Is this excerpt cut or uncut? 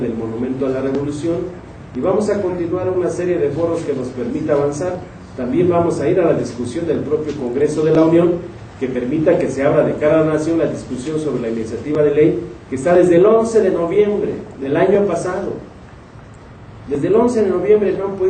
uncut